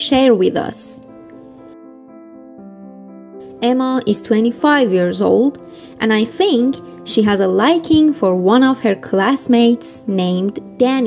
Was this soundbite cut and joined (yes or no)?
yes